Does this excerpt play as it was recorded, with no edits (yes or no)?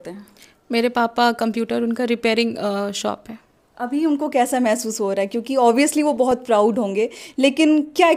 yes